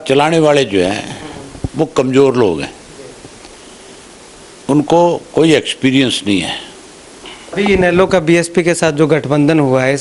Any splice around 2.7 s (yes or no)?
no